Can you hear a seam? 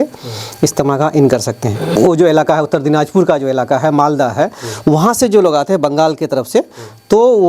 yes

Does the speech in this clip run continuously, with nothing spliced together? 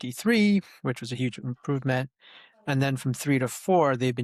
yes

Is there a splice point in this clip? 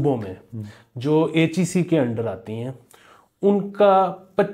no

